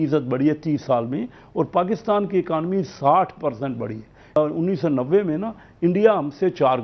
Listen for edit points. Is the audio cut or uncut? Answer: cut